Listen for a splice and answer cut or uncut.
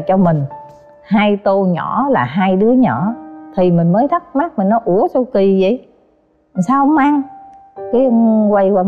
uncut